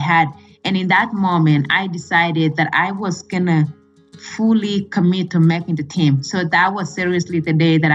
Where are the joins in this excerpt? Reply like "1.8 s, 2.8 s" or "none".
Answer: none